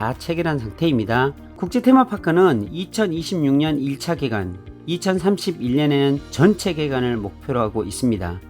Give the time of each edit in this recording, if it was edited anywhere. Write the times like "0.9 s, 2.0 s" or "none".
1.5 s